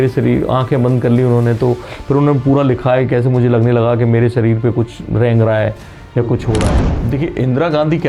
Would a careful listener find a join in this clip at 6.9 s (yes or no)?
yes